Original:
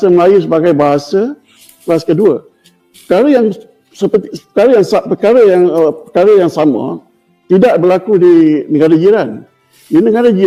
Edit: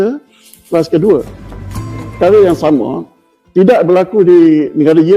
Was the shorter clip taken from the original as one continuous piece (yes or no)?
no